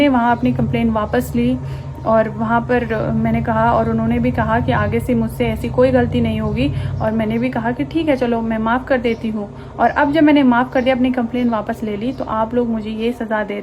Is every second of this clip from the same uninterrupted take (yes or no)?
yes